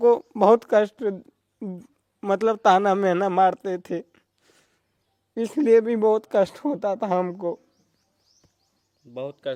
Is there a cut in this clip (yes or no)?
no